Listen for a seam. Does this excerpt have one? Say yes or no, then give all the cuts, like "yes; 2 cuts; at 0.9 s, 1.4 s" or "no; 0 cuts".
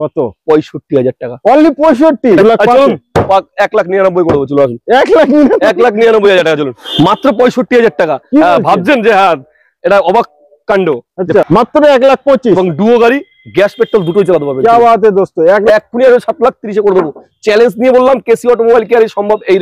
yes; 4 cuts; at 2.4 s, 6.8 s, 11.4 s, 15.6 s